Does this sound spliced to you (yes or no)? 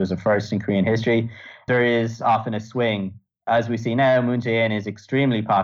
yes